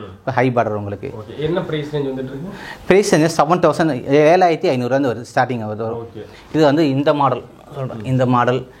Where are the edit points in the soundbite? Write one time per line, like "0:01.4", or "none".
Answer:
none